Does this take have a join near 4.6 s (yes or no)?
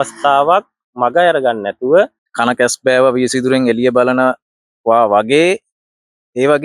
no